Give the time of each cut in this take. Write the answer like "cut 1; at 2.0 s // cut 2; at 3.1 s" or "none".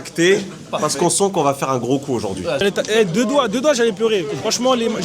cut 1; at 2.6 s